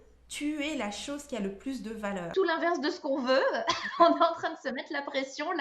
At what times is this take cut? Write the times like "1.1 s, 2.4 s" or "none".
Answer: 2.2 s